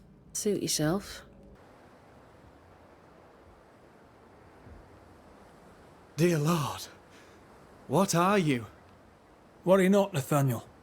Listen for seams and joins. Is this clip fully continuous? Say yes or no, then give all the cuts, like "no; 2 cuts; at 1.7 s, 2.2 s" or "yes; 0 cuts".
no; 1 cut; at 1.6 s